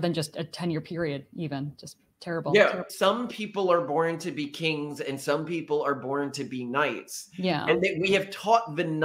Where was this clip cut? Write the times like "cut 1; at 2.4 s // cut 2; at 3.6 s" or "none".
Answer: cut 1; at 2.9 s

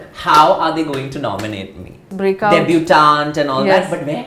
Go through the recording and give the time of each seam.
cut 1; at 2.1 s

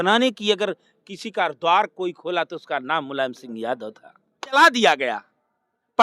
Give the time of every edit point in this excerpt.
cut 1; at 4.6 s

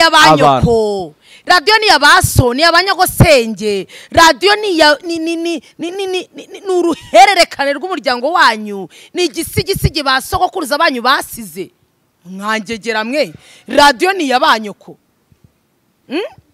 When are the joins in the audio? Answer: none

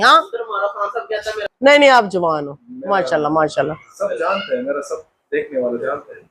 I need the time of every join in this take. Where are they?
cut 1; at 1.4 s

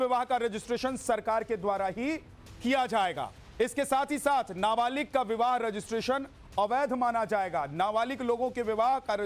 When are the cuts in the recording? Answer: cut 1; at 7.2 s

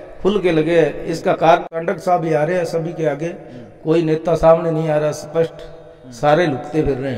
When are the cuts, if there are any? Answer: cut 1; at 1.8 s

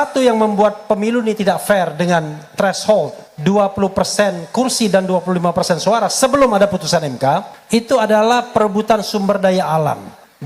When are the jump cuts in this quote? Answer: cut 1; at 3.2 s // cut 2; at 7.5 s

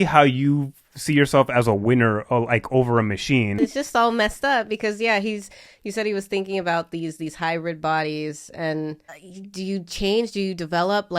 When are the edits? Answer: cut 1; at 3.5 s // cut 2; at 9.1 s

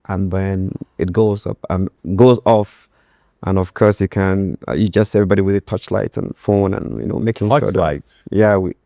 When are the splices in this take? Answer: none

